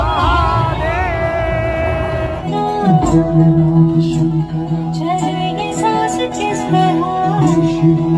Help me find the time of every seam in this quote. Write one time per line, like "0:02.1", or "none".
0:02.5